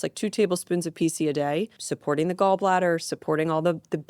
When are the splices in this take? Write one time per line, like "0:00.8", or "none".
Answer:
0:01.8